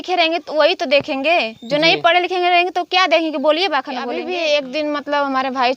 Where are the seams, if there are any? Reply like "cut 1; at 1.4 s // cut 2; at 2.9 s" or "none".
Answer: cut 1; at 4.1 s